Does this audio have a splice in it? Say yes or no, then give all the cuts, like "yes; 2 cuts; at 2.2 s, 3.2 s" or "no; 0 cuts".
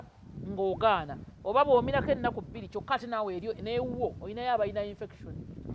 no; 0 cuts